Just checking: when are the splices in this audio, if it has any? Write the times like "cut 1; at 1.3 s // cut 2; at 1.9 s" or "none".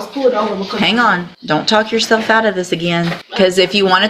cut 1; at 1.3 s // cut 2; at 3.2 s